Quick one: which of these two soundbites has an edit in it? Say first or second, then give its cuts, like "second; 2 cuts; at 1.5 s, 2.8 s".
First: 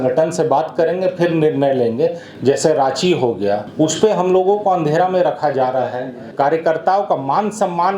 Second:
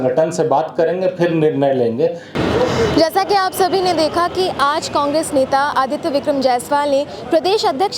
first; 3 cuts; at 2.2 s, 3.7 s, 6.2 s